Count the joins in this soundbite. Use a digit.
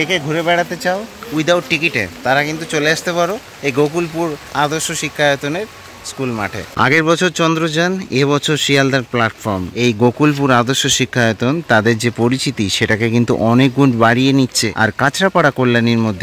0